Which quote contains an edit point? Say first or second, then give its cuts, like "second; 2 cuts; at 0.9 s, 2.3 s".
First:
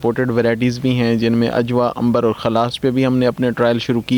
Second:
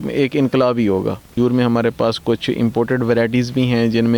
second; 1 cut; at 1.4 s